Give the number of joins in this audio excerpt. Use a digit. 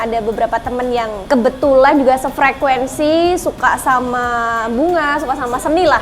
1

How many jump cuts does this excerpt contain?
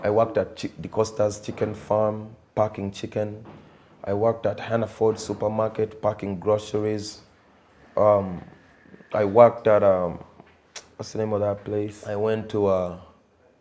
1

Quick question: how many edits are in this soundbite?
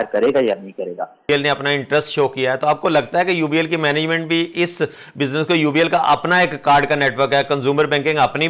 1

